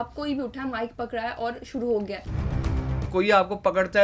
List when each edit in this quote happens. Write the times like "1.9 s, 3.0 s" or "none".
2.8 s